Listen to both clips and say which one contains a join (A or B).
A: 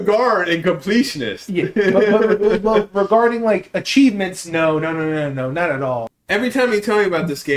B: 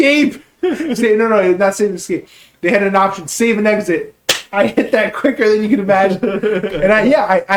A